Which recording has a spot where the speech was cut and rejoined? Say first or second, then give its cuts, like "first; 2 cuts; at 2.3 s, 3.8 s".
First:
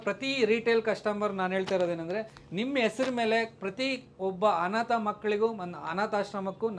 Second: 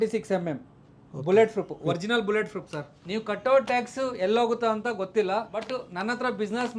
second; 2 cuts; at 3.0 s, 5.7 s